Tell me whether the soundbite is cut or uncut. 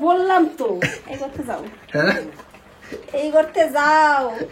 uncut